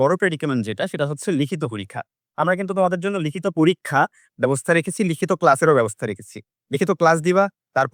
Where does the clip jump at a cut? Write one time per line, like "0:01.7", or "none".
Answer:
none